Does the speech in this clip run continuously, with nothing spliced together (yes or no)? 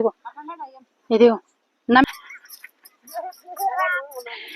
no